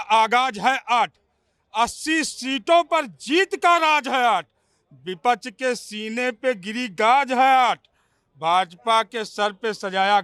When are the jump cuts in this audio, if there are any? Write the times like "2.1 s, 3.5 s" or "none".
none